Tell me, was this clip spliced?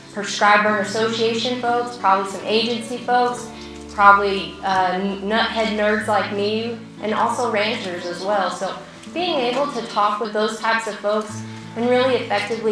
yes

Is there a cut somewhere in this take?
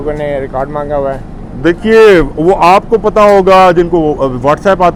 no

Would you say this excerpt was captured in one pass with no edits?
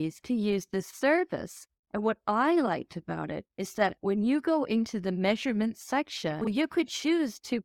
no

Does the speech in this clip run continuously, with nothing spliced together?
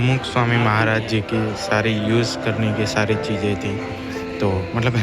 yes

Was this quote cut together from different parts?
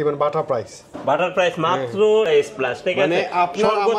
yes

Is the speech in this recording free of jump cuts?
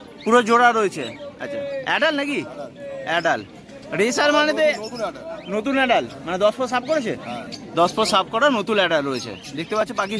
yes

